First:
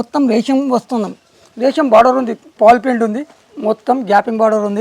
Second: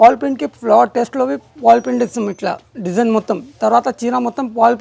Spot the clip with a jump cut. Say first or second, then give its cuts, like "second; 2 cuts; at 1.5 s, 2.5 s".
first; 1 cut; at 2.5 s